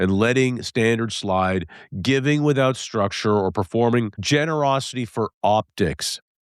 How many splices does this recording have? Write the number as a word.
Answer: one